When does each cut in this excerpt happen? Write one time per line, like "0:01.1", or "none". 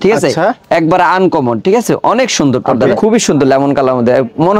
0:02.8